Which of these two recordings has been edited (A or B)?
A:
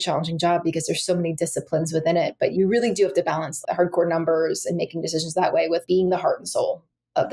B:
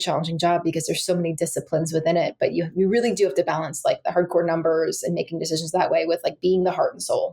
A